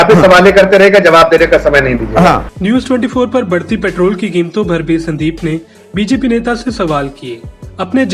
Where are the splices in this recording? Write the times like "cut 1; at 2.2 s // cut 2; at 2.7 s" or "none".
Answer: none